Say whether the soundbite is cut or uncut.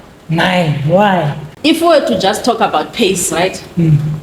cut